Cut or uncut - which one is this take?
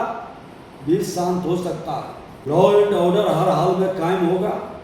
cut